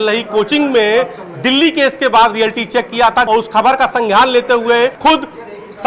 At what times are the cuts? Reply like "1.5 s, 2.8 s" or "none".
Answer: 3.3 s, 5.0 s